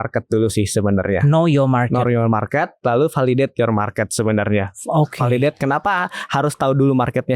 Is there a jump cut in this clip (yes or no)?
no